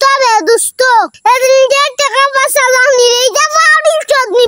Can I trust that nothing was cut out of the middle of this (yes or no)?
yes